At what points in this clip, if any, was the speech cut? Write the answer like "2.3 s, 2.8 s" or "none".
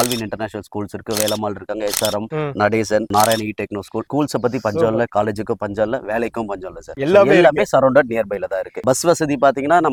none